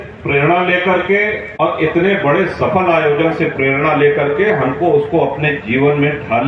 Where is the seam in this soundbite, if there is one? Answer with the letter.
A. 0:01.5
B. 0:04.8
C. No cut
A